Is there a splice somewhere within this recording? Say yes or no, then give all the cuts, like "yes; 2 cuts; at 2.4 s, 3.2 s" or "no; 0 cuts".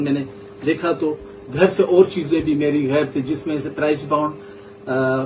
no; 0 cuts